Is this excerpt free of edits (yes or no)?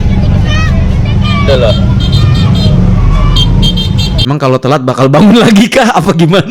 no